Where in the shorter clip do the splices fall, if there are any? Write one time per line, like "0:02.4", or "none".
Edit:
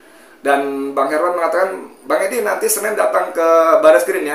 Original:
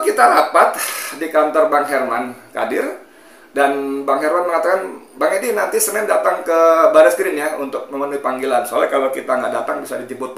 none